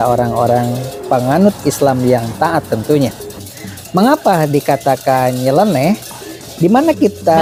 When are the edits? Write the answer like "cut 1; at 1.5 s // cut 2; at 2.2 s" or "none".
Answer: none